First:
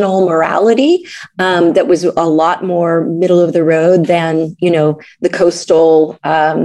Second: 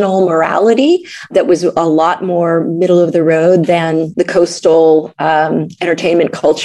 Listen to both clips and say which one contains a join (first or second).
second